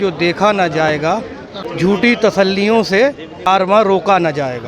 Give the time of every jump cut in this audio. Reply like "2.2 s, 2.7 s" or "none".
1.6 s, 3.5 s